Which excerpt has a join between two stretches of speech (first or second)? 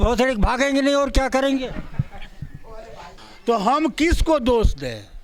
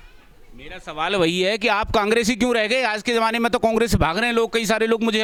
first